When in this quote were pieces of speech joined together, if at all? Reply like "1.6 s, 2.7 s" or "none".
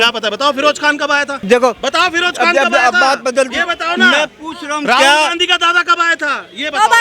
1.4 s